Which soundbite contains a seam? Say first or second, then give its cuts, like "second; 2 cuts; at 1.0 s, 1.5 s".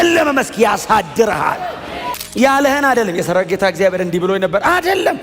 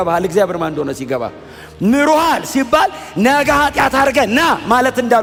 first; 1 cut; at 2.2 s